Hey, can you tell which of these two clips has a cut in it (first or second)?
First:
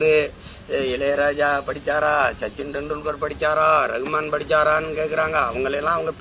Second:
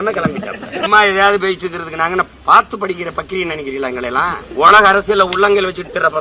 second